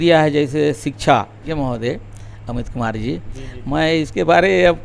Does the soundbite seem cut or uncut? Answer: cut